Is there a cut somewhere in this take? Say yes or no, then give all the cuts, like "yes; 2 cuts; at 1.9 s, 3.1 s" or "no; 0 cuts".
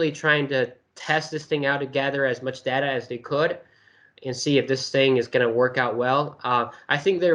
no; 0 cuts